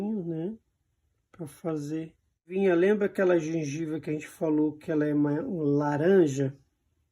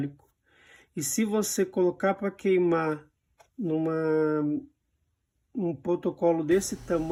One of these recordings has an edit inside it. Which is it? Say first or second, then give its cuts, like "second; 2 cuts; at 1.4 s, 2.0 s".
first; 1 cut; at 2.5 s